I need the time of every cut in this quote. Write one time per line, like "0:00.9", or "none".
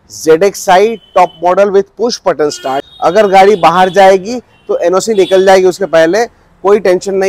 0:02.8